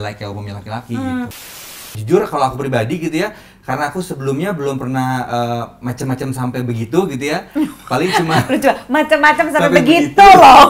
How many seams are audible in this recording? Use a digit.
1